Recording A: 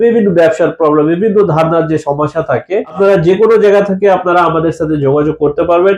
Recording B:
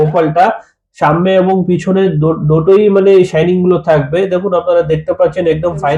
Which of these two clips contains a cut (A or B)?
A